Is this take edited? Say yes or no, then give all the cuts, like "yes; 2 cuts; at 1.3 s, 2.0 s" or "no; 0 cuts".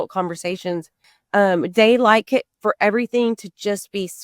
no; 0 cuts